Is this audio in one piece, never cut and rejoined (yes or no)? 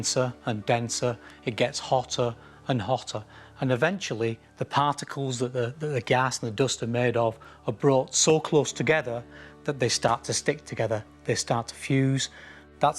no